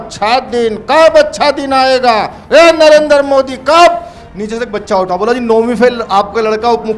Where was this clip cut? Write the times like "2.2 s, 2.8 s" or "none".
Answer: none